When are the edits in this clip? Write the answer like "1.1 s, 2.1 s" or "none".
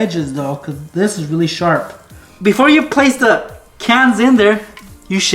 2.2 s

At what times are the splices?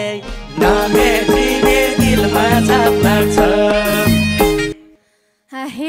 4.8 s

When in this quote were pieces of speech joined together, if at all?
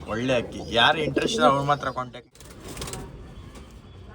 2.2 s

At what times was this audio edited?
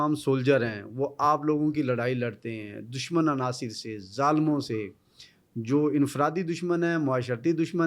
none

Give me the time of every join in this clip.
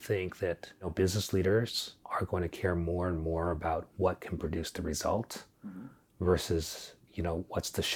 0.9 s, 1.9 s

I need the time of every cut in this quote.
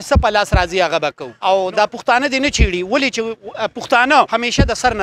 1.3 s, 4.3 s

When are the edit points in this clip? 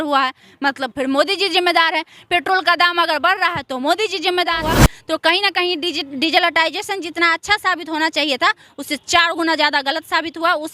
4.6 s

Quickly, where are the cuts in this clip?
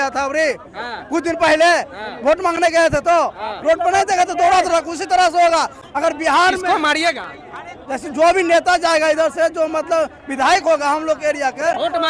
none

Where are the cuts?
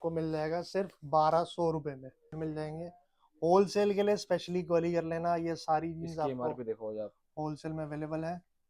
2.3 s

